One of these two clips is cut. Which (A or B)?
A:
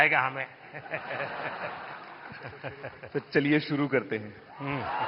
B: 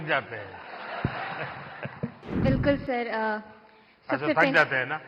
B